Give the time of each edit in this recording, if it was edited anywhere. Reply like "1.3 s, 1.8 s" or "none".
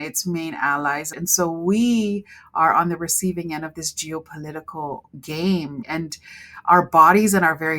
1.1 s, 5.8 s